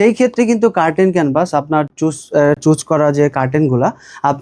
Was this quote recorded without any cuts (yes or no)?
yes